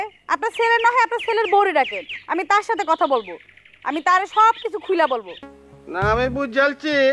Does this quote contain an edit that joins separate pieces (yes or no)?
yes